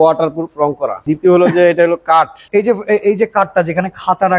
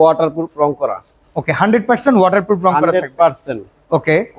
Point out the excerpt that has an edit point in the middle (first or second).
first